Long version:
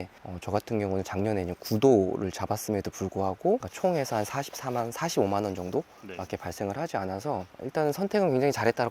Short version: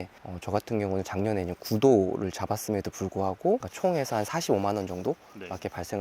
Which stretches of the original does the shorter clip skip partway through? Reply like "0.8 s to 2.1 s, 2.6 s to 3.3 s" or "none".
4.3 s to 5.0 s